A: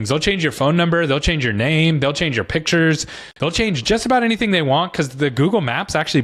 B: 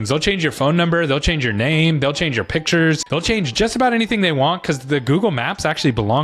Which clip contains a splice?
B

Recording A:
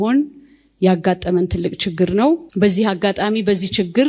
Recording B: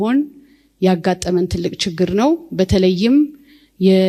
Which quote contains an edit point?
A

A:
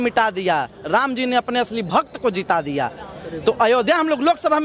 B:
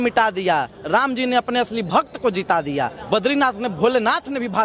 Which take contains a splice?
B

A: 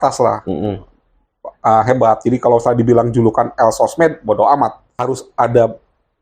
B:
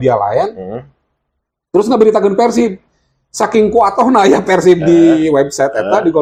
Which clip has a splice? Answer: A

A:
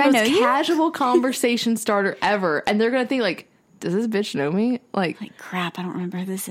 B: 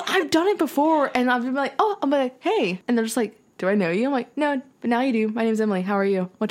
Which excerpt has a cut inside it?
B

